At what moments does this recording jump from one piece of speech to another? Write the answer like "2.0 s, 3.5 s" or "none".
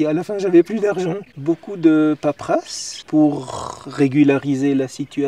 1.3 s